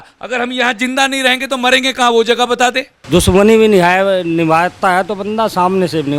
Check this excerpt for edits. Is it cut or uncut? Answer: cut